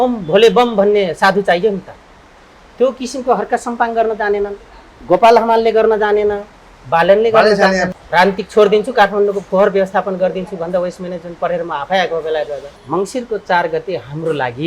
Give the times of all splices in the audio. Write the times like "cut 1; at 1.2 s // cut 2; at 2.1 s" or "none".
cut 1; at 7.9 s // cut 2; at 12.7 s